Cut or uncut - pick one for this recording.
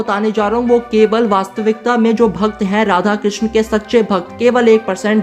uncut